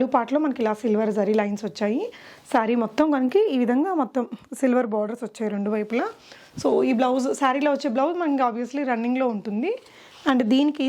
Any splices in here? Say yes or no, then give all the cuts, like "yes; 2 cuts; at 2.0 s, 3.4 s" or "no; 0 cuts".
no; 0 cuts